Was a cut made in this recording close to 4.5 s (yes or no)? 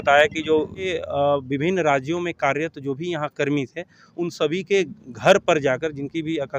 no